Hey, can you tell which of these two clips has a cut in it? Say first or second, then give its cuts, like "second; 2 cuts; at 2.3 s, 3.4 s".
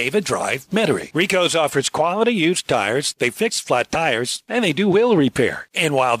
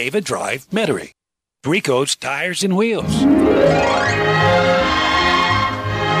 second; 2 cuts; at 1.0 s, 3.0 s